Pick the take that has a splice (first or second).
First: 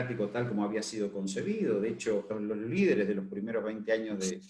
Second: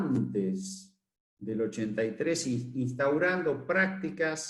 first